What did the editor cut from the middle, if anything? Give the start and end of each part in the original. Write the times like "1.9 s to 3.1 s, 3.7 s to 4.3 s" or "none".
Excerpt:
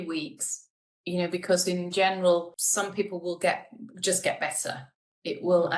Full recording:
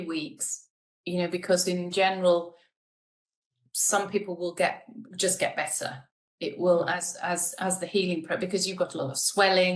2.6 s to 3.8 s